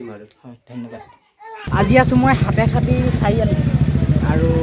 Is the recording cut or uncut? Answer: cut